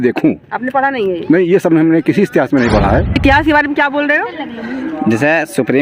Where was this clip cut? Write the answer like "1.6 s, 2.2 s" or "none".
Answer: 3.1 s